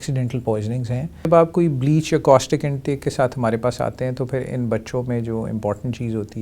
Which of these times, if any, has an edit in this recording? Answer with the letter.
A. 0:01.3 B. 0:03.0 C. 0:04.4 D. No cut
A